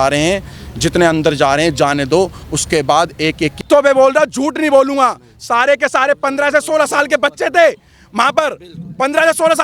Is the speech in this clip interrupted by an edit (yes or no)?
yes